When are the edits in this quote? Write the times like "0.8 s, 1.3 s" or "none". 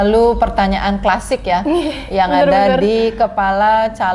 none

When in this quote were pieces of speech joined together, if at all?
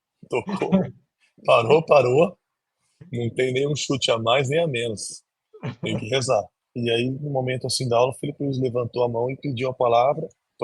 6.6 s

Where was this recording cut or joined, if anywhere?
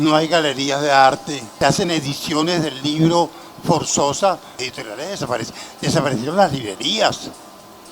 1.5 s, 4.5 s

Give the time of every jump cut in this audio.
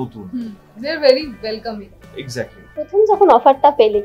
2.6 s

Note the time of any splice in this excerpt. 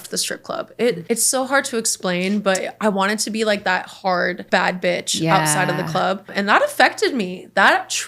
1.0 s, 4.4 s, 6.3 s

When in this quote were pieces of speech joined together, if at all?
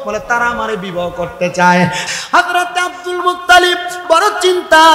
2.1 s

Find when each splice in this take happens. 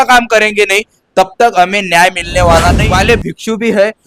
2.8 s

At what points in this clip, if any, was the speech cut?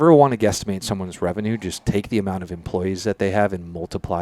none

